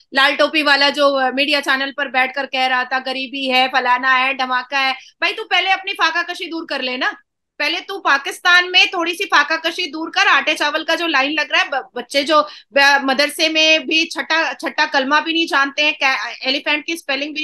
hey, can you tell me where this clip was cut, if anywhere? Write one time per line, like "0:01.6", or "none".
none